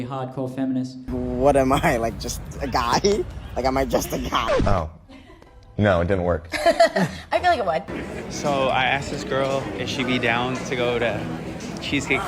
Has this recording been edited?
yes; 3 cuts; at 1.1 s, 4.5 s, 7.9 s

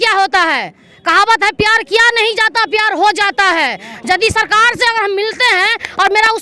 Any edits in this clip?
no; 0 cuts

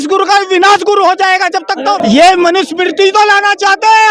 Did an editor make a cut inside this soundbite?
yes; 1 cut; at 2.0 s

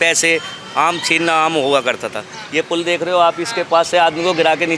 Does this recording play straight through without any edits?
yes; 0 cuts

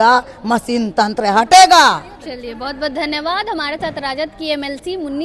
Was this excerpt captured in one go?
yes; 0 cuts

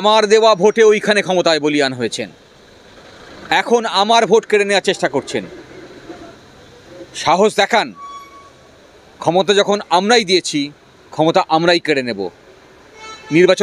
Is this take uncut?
yes; 0 cuts

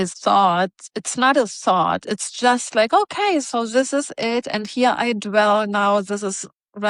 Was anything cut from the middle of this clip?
no; 0 cuts

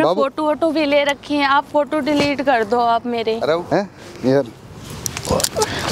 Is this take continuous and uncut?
no; 1 cut; at 3.7 s

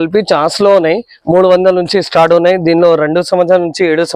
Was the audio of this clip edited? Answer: no; 0 cuts

